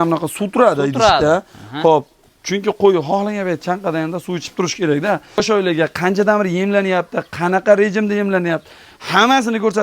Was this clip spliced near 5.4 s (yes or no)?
yes